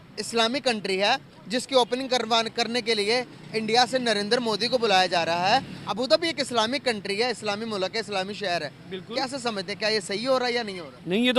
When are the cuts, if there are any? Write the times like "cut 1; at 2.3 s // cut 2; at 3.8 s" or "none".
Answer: cut 1; at 5.8 s